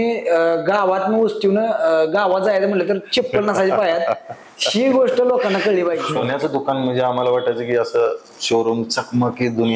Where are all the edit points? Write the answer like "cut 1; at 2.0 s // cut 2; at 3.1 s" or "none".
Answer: cut 1; at 6.1 s

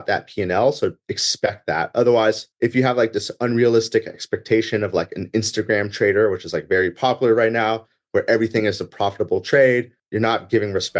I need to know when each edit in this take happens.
cut 1; at 2.5 s // cut 2; at 10.0 s

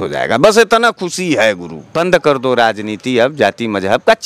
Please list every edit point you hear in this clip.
cut 1; at 1.9 s

